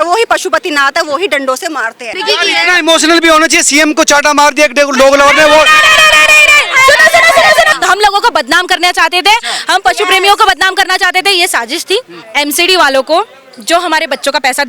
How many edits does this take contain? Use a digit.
3